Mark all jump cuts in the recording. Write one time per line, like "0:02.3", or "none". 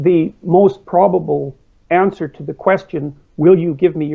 none